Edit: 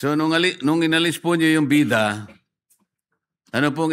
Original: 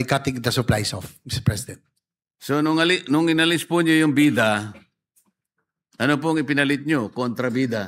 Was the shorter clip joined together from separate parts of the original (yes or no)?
no